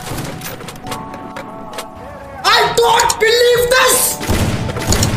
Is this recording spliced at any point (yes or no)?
no